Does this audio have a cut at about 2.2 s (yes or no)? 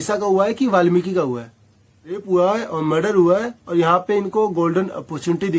yes